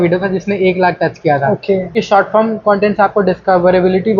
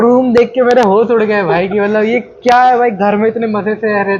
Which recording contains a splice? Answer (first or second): first